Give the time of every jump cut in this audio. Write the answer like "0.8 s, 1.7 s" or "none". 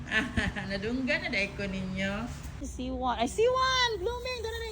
2.6 s